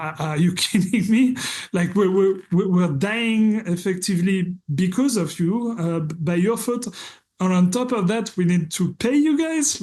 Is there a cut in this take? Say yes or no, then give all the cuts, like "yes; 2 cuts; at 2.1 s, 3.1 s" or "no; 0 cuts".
no; 0 cuts